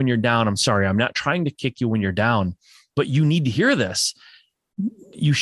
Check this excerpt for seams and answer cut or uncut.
uncut